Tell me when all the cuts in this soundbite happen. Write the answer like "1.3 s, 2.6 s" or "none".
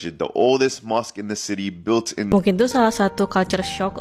2.3 s